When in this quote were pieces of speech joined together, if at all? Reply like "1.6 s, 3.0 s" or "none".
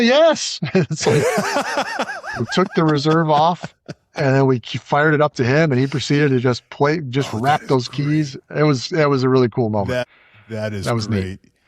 10.0 s